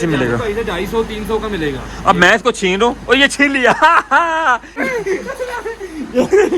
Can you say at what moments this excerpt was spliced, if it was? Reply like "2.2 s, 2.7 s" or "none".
4.8 s